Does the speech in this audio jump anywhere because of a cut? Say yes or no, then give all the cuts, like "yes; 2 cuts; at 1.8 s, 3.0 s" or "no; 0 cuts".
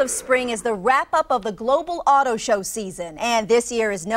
no; 0 cuts